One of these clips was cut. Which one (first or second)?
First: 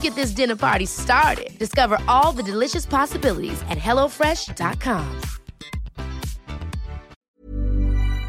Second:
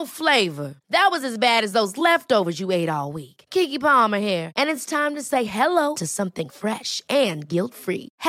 first